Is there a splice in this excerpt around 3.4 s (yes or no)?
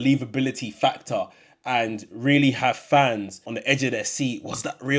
yes